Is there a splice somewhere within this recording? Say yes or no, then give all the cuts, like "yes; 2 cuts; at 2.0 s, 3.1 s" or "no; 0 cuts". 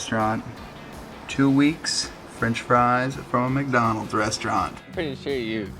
yes; 1 cut; at 4.8 s